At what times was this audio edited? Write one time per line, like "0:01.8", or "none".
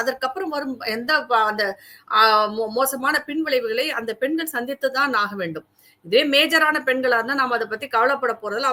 none